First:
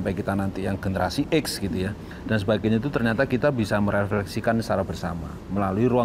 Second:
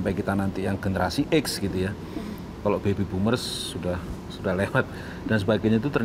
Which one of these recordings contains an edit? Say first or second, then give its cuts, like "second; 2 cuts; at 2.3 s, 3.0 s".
first; 1 cut; at 2.1 s